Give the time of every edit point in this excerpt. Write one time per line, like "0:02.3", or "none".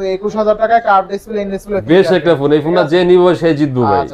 none